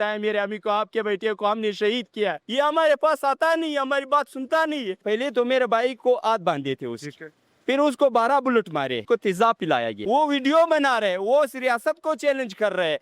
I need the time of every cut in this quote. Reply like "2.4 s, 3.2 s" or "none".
2.4 s, 5.0 s, 9.0 s, 10.0 s